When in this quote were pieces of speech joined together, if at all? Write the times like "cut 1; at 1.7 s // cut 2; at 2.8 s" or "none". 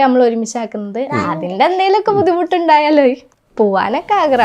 cut 1; at 3.3 s